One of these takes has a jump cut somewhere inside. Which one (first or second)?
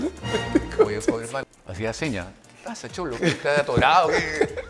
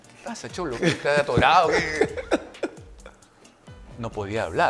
first